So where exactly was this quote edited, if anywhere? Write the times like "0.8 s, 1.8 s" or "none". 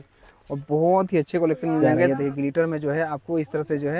2.1 s